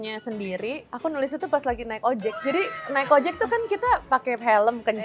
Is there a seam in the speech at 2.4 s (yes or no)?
yes